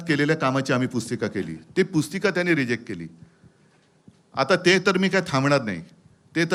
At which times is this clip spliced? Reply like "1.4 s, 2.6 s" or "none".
none

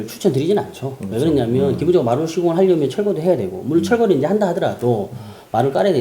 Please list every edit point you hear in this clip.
none

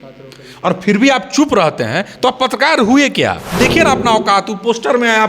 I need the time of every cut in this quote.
3.5 s

